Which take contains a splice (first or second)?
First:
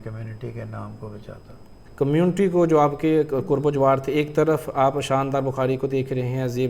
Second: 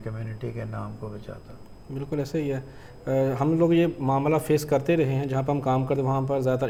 first